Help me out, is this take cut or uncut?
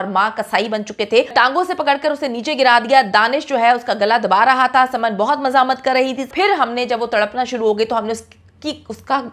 cut